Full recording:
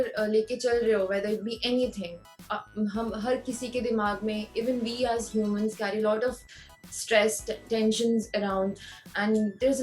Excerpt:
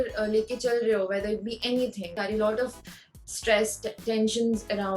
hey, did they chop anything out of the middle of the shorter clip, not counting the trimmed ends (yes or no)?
yes